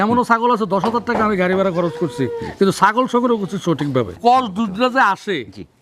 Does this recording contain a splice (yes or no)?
yes